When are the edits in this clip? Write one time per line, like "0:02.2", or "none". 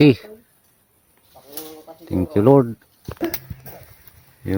none